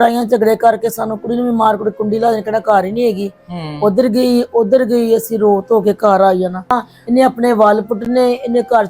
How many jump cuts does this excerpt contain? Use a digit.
1